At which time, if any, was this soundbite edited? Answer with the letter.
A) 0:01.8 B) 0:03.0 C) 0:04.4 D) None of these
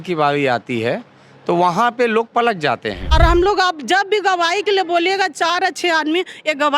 B